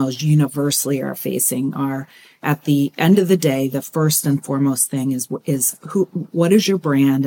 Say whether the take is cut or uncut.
cut